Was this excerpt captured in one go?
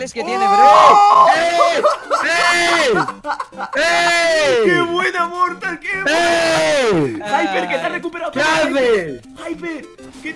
yes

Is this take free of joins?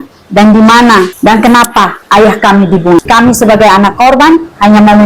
no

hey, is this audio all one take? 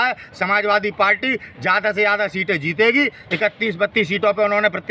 yes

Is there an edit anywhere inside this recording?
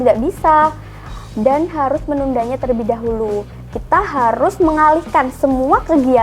no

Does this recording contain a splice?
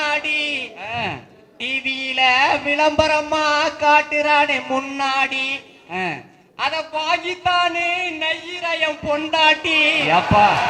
no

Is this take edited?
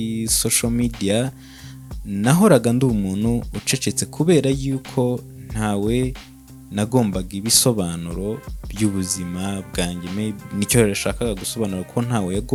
no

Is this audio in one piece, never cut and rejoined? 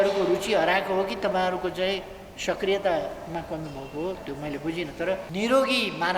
no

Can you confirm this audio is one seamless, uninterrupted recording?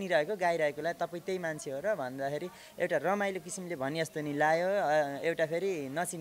yes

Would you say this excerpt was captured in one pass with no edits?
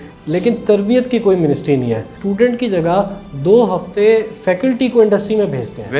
no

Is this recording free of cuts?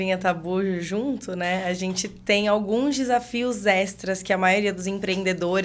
yes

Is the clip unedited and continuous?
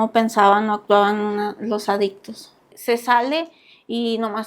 no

